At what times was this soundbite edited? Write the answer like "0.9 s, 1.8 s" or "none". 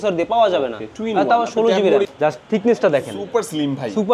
2.1 s